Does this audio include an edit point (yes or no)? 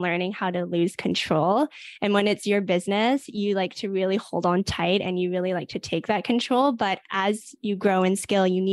no